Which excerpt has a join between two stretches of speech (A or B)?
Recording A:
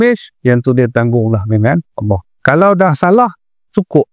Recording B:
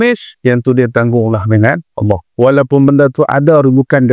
A